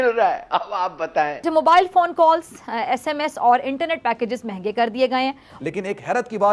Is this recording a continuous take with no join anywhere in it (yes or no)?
no